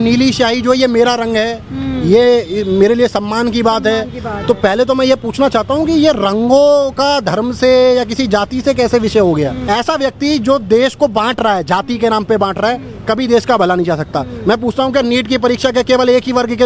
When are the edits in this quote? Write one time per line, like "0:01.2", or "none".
0:09.6